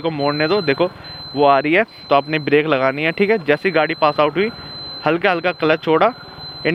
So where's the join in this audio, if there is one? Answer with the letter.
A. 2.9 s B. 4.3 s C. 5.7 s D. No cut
D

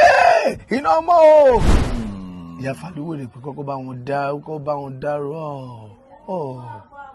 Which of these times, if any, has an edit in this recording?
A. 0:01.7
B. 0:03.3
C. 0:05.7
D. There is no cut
A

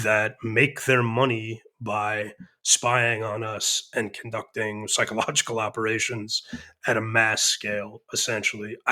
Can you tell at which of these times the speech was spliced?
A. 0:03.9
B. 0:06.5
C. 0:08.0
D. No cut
D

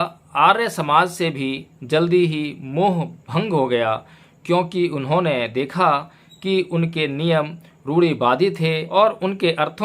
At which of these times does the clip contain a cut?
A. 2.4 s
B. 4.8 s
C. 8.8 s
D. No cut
C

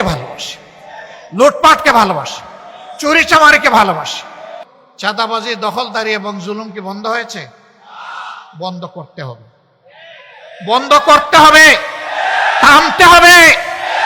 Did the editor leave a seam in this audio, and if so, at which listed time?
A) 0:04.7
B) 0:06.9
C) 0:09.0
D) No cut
A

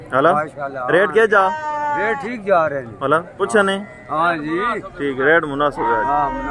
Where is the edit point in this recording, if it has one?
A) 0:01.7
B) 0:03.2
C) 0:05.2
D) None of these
D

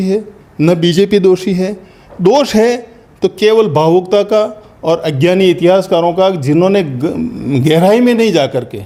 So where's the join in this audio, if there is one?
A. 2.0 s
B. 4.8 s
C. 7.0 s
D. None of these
D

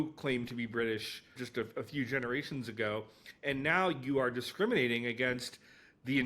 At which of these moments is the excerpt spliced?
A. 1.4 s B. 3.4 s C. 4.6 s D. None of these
A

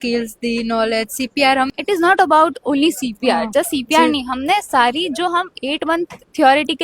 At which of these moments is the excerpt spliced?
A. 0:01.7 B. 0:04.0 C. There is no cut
A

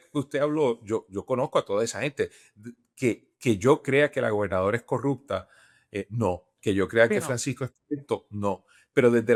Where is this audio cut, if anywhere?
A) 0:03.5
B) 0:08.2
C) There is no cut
C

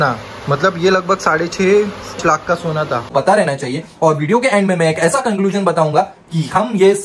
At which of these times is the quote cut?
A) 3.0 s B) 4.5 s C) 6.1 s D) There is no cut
A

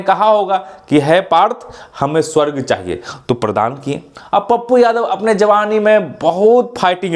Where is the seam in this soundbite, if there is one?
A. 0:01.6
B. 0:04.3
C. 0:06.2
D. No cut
D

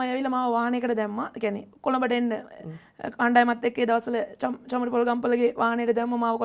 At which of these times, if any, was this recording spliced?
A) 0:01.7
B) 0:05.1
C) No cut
C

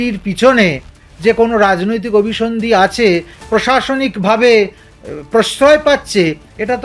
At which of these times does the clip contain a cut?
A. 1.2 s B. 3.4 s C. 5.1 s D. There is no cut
B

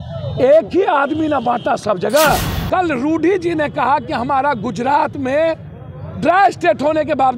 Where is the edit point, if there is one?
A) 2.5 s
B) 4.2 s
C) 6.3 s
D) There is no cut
A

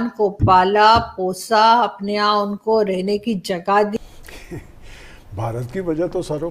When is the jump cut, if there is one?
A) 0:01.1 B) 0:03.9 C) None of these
B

